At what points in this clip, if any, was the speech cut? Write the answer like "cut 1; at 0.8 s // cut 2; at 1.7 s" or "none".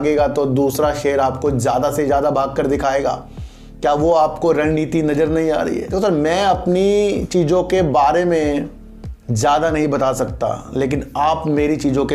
cut 1; at 5.9 s